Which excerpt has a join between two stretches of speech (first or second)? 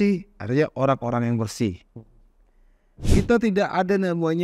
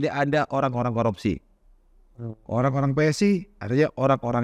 first